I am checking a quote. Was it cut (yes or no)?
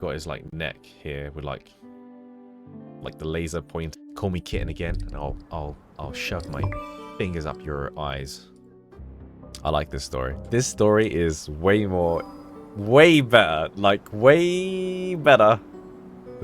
yes